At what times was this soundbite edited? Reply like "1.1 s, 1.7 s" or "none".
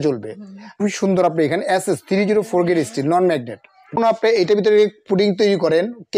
0.8 s, 4.0 s